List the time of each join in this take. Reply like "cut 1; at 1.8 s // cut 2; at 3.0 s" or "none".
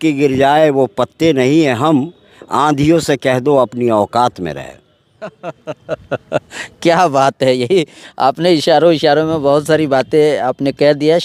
none